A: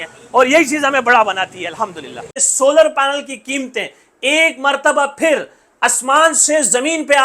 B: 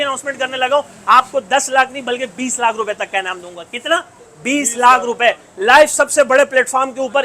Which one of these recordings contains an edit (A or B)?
A